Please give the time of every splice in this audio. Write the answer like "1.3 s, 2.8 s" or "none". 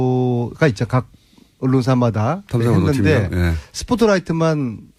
none